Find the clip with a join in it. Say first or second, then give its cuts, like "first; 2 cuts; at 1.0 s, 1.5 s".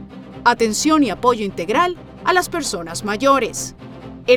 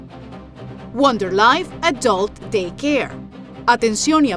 second; 1 cut; at 0.9 s